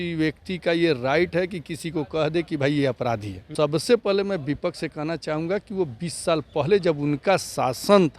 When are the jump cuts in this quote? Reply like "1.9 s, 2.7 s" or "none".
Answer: 3.4 s